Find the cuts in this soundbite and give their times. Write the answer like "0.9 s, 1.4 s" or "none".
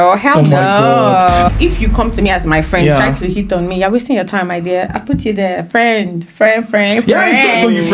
1.5 s